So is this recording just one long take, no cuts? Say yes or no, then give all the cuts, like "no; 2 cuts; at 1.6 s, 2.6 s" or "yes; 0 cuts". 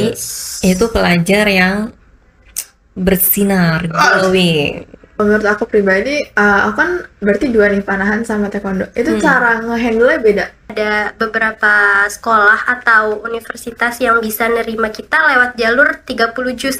no; 2 cuts; at 5.2 s, 10.6 s